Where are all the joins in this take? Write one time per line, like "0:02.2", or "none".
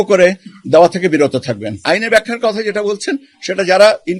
0:01.7